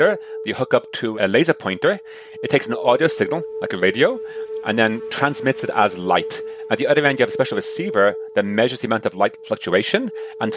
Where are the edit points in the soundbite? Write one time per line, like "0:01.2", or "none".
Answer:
none